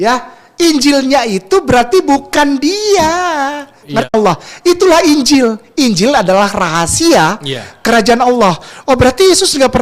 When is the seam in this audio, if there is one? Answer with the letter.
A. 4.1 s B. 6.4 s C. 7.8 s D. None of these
A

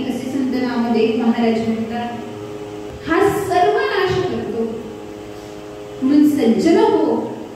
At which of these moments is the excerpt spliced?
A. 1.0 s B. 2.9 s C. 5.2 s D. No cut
B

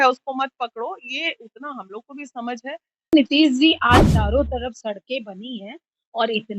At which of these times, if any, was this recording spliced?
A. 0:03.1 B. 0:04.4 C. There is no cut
A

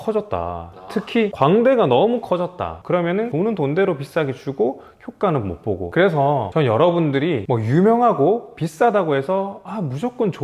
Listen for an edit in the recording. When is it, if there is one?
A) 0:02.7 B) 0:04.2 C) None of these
A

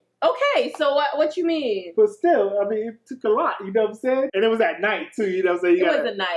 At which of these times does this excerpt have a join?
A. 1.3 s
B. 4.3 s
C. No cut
B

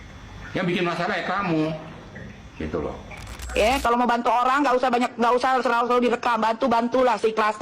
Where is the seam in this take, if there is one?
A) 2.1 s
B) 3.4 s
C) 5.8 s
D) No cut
B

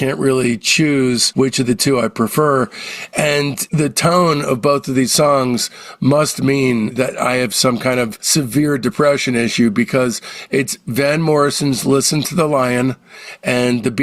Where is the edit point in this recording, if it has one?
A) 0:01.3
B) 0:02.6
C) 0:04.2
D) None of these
A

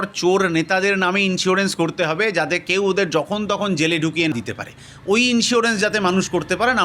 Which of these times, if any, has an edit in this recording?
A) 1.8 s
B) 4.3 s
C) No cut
B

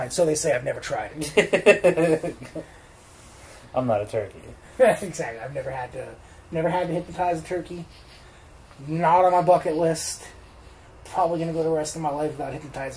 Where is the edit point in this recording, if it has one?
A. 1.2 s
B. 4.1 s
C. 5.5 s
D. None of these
D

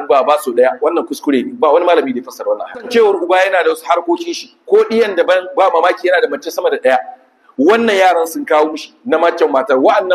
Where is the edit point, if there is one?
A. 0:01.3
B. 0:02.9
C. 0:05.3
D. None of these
B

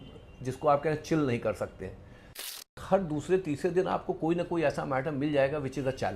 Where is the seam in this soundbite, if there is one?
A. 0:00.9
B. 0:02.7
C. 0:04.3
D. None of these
B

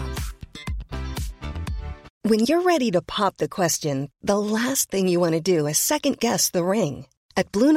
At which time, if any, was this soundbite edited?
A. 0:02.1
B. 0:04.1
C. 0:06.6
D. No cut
A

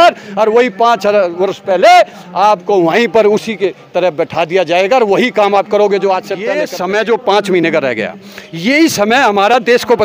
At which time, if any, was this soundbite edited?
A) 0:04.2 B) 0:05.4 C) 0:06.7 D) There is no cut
C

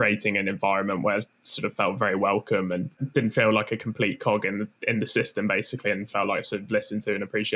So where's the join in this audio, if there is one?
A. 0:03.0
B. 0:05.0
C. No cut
A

